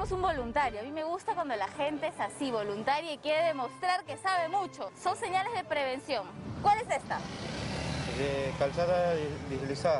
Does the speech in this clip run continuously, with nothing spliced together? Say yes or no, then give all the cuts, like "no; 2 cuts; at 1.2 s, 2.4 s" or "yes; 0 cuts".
no; 2 cuts; at 4.9 s, 6.5 s